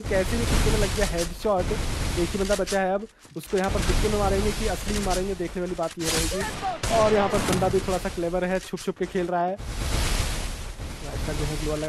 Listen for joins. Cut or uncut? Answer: uncut